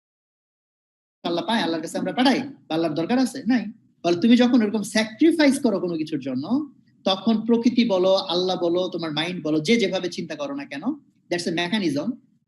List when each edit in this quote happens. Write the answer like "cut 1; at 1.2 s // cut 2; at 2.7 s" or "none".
cut 1; at 3.8 s